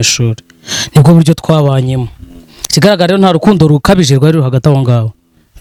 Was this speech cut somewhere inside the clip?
no; 0 cuts

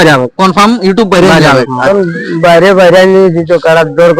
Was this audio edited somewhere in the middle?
yes; 1 cut; at 1.8 s

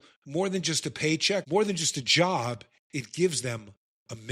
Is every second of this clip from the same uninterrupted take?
no; 1 cut; at 1.4 s

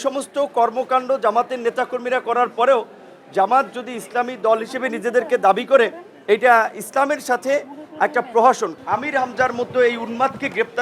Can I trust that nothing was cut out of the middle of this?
no; 1 cut; at 8.7 s

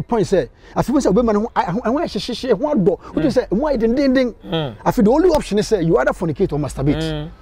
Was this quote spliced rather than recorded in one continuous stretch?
no; 0 cuts

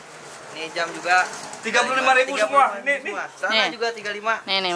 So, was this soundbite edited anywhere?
no; 0 cuts

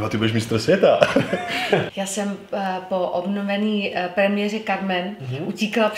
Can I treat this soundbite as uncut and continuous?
no; 1 cut; at 1.9 s

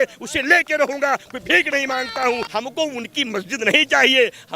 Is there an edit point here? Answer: yes; 1 cut; at 2.5 s

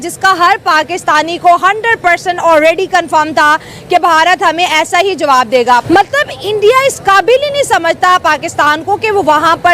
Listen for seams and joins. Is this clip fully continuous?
no; 1 cut; at 5.8 s

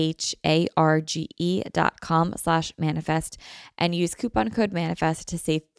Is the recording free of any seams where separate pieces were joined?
yes; 0 cuts

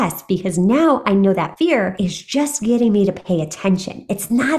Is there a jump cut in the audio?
yes; 1 cut; at 1.6 s

